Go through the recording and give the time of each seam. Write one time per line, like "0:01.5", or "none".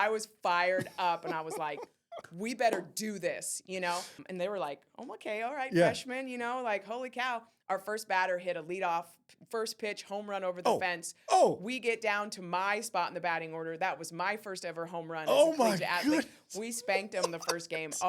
0:04.2